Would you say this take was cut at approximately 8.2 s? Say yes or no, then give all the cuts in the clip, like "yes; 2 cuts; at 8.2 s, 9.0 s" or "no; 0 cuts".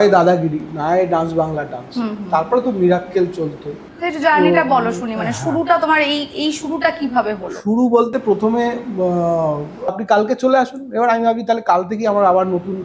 no; 1 cut; at 9.9 s